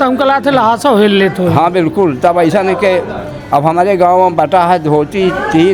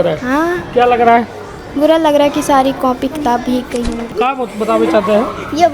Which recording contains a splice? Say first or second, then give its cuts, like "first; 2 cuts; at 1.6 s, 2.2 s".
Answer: second; 1 cut; at 4.1 s